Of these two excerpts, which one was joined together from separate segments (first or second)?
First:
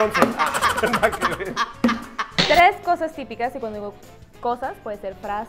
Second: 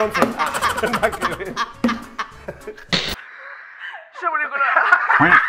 first